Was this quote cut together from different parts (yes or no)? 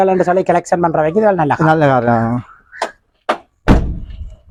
no